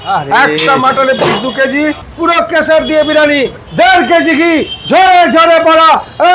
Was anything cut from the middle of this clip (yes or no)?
yes